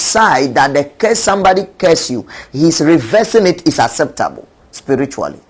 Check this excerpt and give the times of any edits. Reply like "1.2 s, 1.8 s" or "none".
none